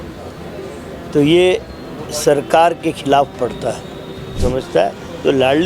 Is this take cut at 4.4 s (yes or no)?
yes